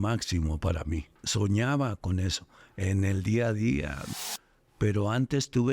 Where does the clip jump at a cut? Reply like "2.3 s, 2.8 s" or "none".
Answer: 1.2 s, 4.1 s